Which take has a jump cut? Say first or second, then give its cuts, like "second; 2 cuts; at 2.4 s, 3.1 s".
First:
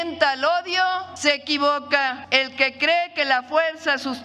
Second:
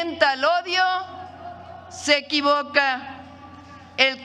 first; 2 cuts; at 1.1 s, 2.2 s